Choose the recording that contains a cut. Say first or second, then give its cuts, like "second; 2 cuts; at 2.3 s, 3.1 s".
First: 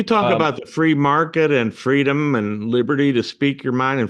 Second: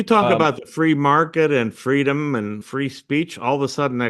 second; 1 cut; at 2.6 s